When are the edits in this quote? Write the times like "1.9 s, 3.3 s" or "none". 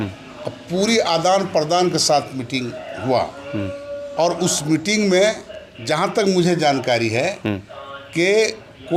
none